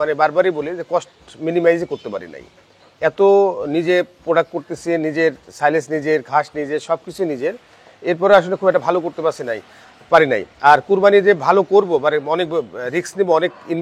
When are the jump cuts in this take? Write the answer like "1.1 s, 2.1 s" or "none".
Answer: none